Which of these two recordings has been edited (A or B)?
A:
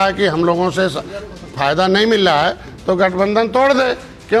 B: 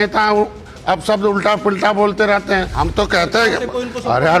B